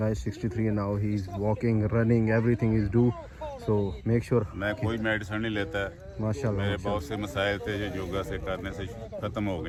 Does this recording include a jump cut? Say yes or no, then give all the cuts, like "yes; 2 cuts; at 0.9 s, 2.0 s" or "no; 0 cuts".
no; 0 cuts